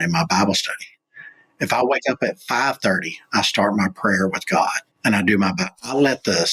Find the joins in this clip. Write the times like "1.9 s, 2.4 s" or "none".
4.9 s